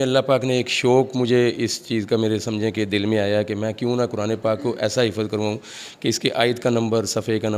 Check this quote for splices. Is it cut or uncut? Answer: uncut